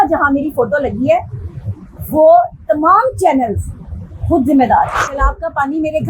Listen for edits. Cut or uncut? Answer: cut